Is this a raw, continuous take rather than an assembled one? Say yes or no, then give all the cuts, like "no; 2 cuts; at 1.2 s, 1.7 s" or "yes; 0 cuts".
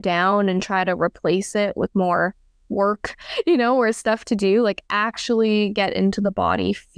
yes; 0 cuts